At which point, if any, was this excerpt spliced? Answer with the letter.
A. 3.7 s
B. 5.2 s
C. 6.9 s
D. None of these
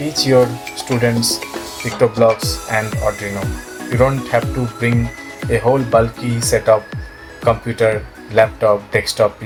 D